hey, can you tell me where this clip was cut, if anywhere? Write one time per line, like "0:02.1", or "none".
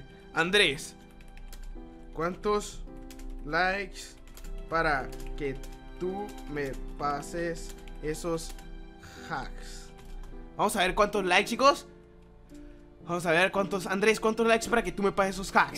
none

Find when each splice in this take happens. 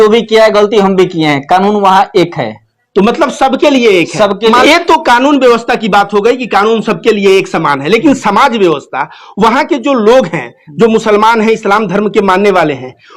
0:04.6

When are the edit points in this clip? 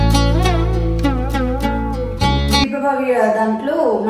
0:02.6

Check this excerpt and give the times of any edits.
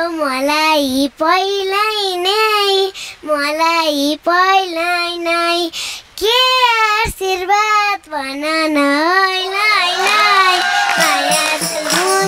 none

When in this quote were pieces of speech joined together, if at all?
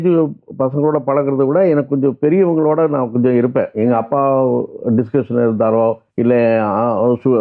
0:06.1

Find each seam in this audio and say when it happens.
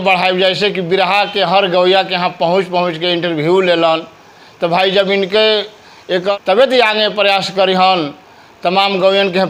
none

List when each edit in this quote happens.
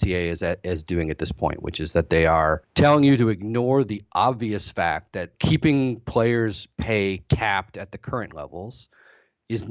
0:02.7
0:05.3

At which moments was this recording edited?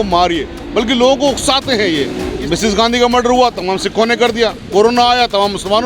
0:02.4

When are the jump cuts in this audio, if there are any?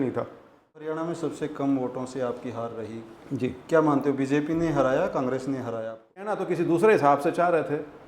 0:00.8
0:06.4

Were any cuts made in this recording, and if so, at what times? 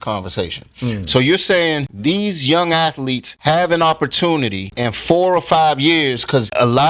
none

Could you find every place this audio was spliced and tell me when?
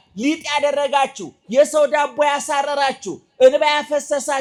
none

